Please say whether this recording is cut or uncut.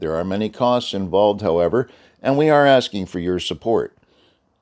uncut